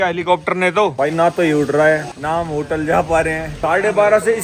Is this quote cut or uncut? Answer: cut